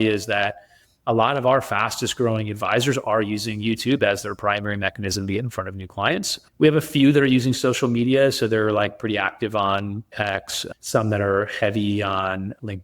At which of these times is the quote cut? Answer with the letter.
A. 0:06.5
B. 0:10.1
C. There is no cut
B